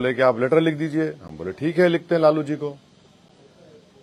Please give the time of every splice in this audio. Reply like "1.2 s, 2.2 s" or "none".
none